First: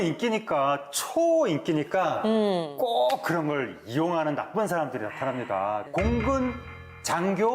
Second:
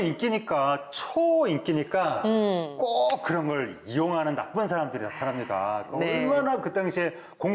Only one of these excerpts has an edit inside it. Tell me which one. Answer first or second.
first